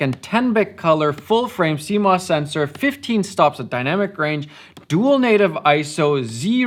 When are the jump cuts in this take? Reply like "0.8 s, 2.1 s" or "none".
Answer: none